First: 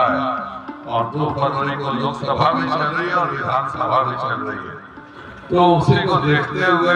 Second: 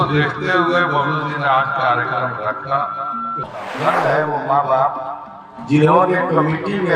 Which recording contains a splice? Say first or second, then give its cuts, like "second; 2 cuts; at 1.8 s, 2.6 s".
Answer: second; 1 cut; at 3.4 s